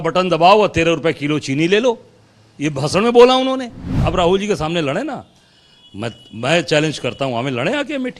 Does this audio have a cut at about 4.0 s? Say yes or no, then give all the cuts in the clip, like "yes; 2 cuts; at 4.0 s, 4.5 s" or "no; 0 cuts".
yes; 1 cut; at 4.0 s